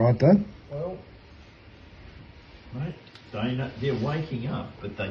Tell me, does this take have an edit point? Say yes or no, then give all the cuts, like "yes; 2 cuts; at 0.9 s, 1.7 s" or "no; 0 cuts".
no; 0 cuts